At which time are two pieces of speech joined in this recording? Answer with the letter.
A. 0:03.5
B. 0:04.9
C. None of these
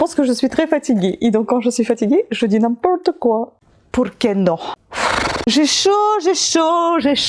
A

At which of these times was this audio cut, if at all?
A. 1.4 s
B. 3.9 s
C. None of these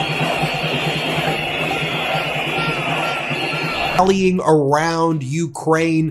B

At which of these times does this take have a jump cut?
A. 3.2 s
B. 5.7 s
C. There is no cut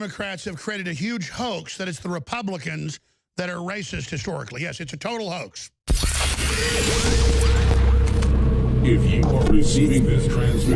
B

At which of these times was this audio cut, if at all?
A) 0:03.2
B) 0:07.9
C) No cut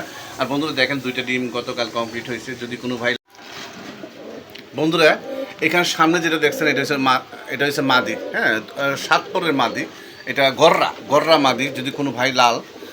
A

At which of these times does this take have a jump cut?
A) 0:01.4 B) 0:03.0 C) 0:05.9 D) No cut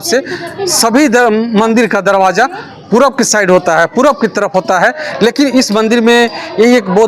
D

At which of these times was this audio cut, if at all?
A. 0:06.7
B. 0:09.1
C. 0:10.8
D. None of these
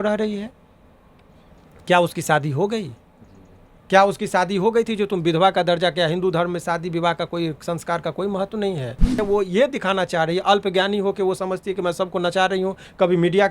B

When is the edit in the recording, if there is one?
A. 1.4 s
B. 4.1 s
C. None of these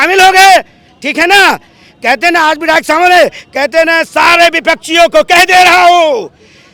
C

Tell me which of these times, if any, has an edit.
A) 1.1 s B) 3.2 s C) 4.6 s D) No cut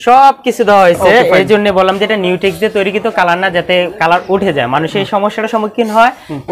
D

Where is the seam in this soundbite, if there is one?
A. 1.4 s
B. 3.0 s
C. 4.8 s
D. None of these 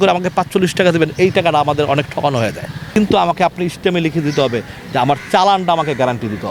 B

